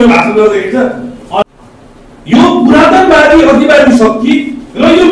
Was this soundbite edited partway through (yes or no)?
yes